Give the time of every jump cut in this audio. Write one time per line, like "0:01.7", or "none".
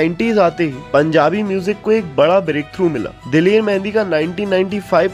none